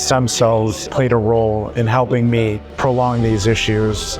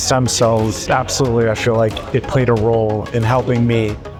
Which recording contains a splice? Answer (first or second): first